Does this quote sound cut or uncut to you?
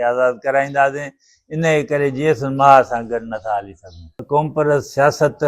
cut